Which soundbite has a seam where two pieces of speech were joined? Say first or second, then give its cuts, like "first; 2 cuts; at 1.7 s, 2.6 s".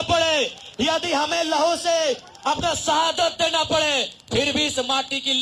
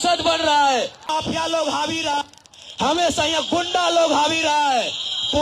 second; 1 cut; at 1.0 s